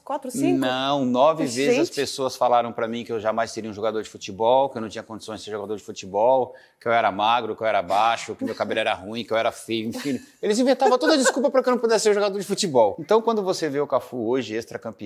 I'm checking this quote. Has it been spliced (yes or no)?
yes